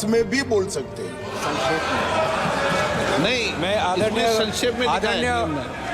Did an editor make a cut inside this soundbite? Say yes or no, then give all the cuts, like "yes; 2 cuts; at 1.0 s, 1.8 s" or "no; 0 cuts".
no; 0 cuts